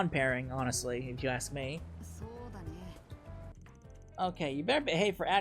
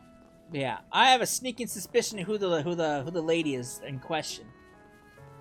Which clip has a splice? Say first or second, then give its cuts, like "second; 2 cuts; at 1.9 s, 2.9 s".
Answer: first; 1 cut; at 3.5 s